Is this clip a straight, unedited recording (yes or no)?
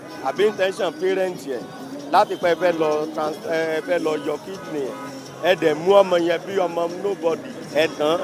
yes